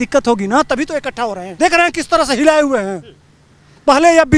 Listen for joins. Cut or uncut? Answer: cut